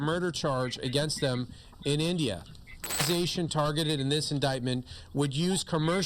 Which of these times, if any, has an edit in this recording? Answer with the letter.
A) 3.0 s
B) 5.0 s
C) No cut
A